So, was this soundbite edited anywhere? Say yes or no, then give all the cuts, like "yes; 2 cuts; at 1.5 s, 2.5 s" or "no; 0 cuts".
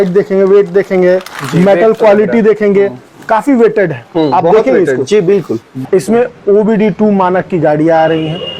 yes; 1 cut; at 5.6 s